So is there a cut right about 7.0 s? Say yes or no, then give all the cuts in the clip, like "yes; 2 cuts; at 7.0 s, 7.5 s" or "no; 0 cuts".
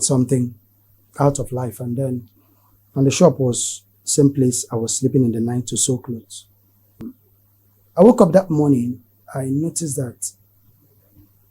yes; 1 cut; at 7.0 s